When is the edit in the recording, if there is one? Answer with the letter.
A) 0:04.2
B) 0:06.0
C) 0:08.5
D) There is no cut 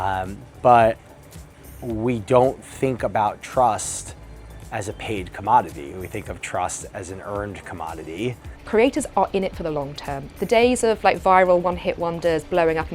C